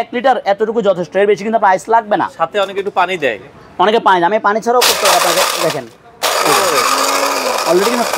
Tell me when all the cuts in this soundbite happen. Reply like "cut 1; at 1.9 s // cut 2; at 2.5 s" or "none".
none